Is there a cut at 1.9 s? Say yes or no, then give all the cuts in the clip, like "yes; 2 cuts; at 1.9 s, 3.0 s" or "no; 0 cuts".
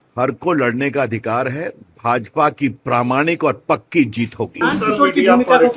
no; 1 cut; at 4.5 s